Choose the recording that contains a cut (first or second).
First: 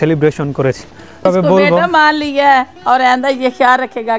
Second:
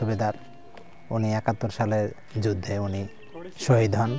first